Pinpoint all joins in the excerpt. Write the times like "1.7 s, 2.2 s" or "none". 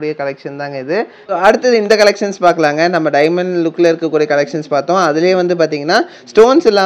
1.2 s